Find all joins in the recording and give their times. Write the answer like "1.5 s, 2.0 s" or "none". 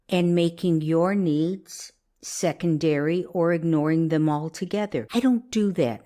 5.0 s

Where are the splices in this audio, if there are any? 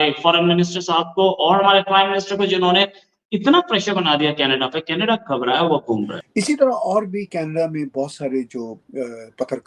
6.2 s

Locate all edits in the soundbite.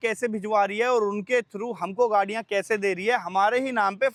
none

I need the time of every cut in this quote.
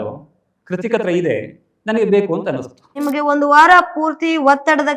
3.0 s

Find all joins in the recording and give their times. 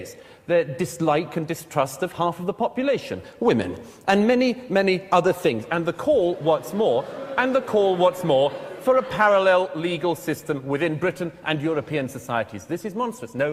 none

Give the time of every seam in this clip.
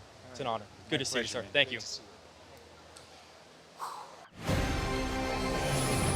4.3 s

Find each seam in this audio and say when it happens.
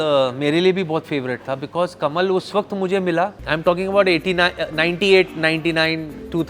3.4 s

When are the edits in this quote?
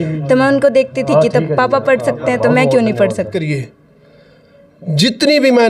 3.4 s

